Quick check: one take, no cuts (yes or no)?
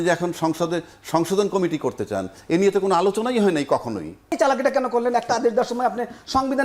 no